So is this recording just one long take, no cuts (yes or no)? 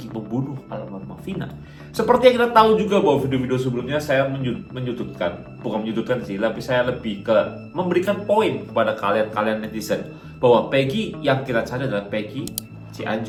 yes